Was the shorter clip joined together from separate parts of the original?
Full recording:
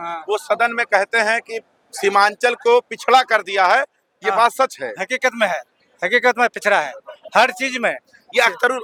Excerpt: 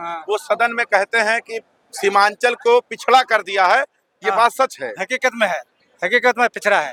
no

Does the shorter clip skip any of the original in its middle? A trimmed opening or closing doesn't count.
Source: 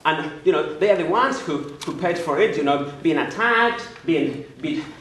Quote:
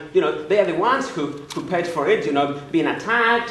no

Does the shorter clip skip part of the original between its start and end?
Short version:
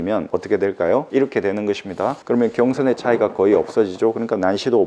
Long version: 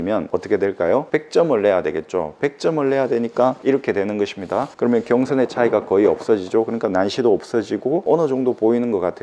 yes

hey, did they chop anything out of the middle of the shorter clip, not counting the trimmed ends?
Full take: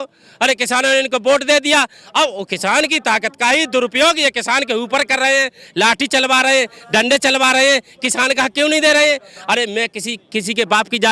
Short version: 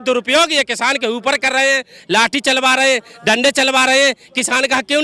no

